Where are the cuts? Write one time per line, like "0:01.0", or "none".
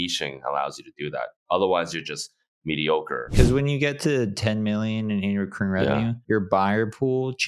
0:03.3
0:06.2